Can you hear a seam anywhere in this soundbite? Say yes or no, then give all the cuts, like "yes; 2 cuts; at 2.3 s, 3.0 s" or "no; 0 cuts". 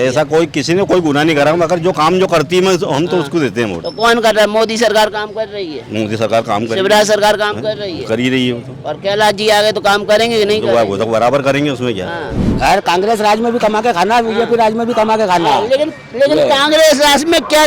no; 0 cuts